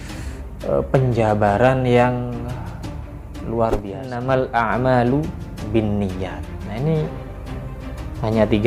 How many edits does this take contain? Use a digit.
1